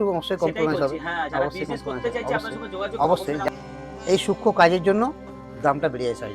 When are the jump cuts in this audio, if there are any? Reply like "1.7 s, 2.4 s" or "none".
3.5 s